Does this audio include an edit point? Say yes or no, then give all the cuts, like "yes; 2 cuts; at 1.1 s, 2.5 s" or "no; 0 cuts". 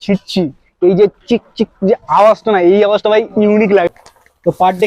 yes; 1 cut; at 3.9 s